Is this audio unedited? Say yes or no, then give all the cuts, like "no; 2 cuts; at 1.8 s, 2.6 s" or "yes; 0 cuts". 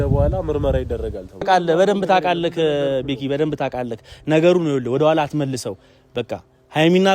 no; 1 cut; at 1.5 s